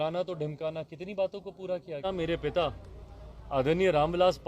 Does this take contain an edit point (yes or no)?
yes